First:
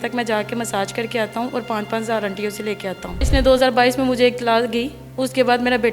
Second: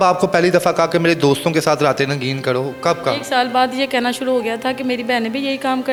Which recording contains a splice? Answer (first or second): first